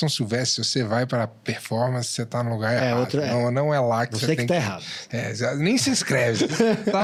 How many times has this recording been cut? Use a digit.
0